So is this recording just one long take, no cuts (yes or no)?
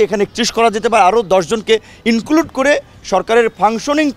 yes